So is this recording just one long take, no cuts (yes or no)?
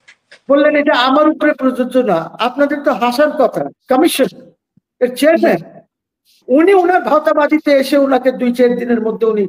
no